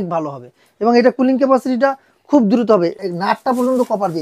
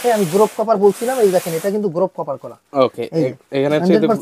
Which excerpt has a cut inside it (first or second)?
first